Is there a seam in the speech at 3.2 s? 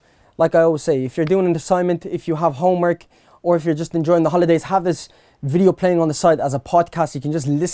no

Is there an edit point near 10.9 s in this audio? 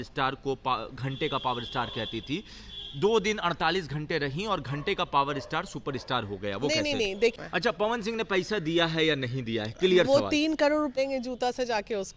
yes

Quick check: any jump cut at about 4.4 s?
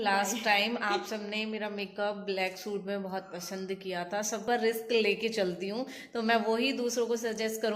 yes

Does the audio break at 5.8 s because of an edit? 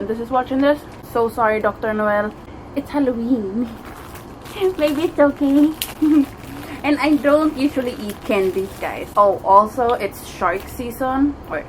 no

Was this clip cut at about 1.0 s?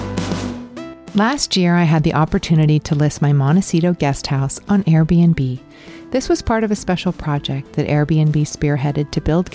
yes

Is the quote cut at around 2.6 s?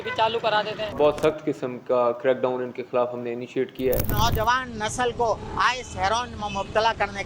no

